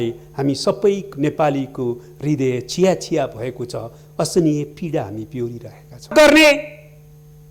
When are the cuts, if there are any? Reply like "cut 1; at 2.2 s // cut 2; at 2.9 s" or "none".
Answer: cut 1; at 6.1 s